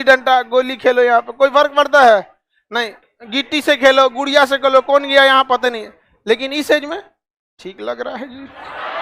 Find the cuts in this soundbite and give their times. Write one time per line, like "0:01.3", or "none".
0:03.0